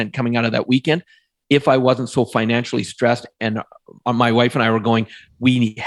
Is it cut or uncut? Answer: uncut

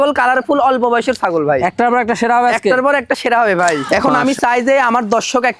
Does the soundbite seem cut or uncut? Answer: cut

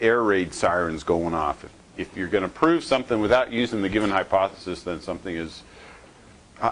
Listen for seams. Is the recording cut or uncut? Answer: uncut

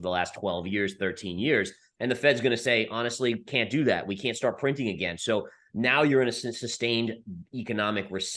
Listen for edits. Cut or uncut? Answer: uncut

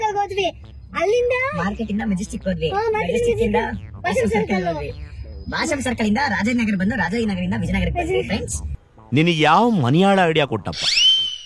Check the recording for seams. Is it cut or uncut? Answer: uncut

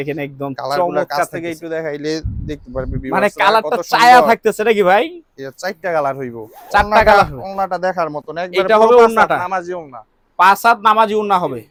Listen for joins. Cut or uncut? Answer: uncut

